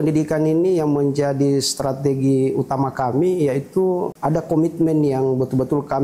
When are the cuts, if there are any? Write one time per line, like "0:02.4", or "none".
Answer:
0:04.1